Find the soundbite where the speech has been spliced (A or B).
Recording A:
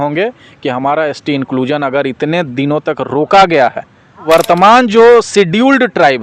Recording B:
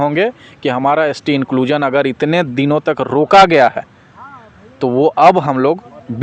A